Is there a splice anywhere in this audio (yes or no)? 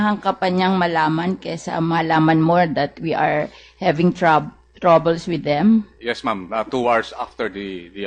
yes